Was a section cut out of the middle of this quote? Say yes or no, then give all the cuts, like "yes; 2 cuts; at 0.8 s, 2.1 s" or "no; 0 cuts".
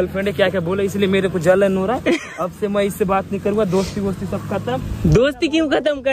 no; 0 cuts